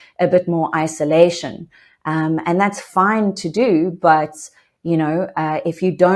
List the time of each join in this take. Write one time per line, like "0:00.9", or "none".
none